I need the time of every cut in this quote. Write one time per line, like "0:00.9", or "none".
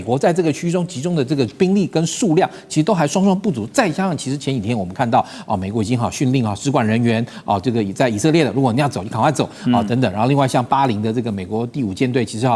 none

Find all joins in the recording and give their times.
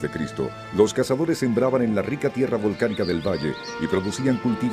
0:02.9

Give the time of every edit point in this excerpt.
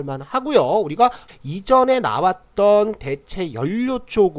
0:01.3

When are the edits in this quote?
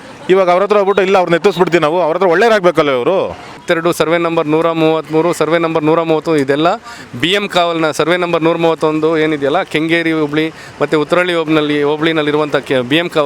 0:03.6

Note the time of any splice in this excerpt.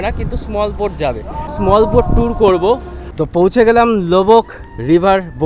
0:01.5
0:03.0

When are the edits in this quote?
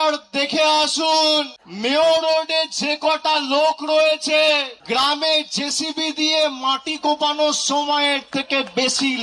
0:01.6
0:04.7

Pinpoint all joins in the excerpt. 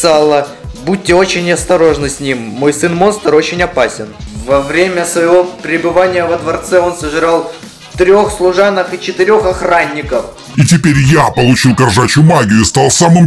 0:10.5

